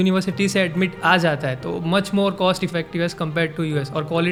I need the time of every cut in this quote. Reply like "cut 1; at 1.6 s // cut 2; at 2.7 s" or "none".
none